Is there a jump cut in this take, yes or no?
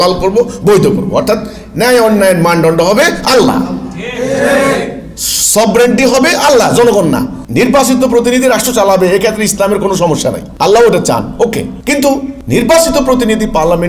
yes